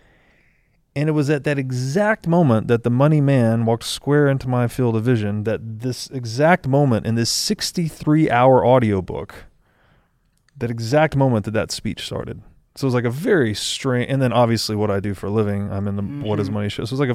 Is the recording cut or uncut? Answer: uncut